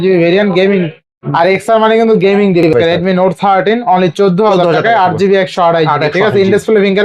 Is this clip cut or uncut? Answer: cut